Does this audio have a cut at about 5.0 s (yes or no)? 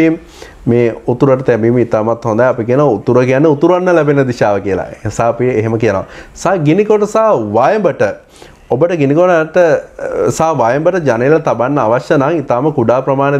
no